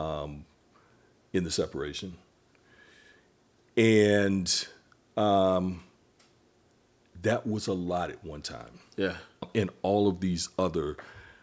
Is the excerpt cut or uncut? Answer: cut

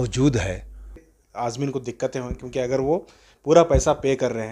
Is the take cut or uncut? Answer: cut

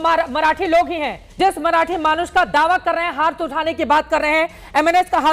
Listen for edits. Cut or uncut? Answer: cut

